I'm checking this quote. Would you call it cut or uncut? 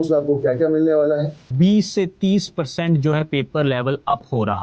cut